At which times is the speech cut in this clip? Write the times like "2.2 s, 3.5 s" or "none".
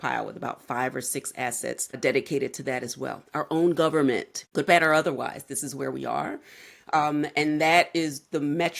2.0 s, 4.4 s